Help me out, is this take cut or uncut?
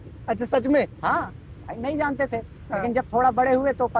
uncut